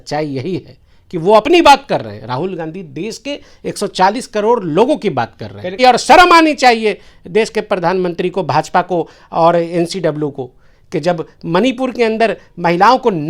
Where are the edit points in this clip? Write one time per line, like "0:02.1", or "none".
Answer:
0:05.8